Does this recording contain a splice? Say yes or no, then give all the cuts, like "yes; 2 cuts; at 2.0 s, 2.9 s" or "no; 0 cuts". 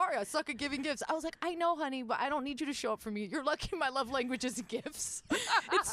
no; 0 cuts